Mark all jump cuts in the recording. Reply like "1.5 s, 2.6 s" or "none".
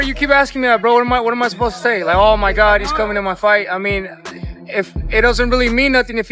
none